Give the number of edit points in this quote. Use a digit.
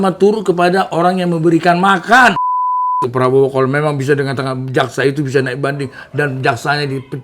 1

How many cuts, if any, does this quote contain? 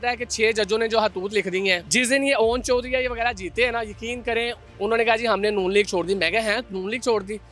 1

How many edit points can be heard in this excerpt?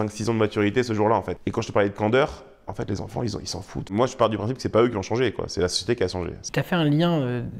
3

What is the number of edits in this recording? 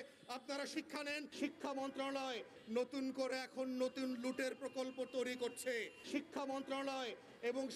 3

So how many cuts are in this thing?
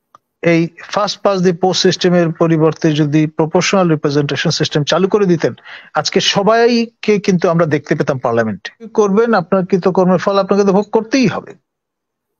1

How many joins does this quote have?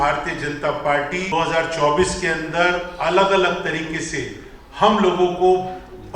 1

